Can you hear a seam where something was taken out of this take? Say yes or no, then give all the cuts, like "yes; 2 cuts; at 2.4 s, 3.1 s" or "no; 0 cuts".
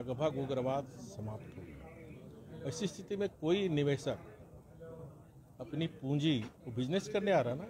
no; 0 cuts